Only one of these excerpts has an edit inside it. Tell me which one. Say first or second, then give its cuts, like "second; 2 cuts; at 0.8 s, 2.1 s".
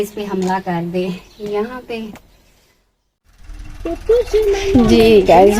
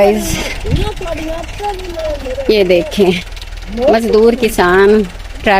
first; 1 cut; at 3.3 s